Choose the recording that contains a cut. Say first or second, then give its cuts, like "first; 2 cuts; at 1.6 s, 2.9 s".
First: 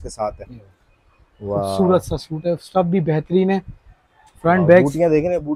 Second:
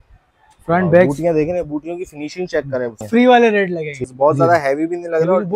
second; 2 cuts; at 3.1 s, 4.1 s